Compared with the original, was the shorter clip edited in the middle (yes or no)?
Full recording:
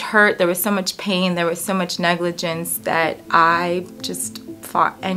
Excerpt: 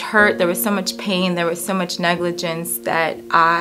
no